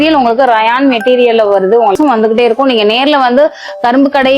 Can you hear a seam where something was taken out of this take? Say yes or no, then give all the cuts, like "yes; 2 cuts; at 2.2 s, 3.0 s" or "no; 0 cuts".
yes; 1 cut; at 2.0 s